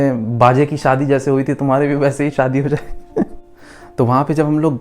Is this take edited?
yes; 1 cut; at 3.5 s

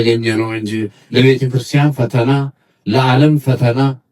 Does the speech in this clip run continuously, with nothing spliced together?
no; 1 cut; at 0.9 s

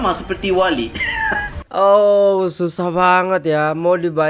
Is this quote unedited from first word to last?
yes; 0 cuts

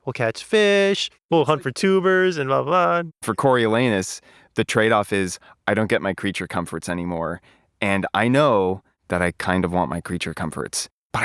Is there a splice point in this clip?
yes; 2 cuts; at 1.3 s, 3.1 s

